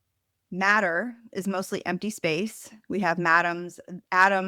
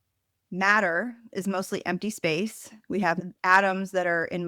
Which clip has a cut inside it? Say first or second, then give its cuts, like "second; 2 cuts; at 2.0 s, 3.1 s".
second; 1 cut; at 3.2 s